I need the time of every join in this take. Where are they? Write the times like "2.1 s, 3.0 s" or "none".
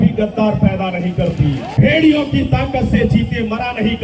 1.6 s